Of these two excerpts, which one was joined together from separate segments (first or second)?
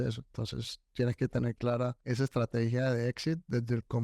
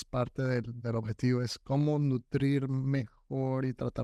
first